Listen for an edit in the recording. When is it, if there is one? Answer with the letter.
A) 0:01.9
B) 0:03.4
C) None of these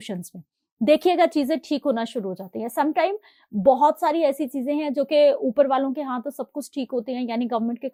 C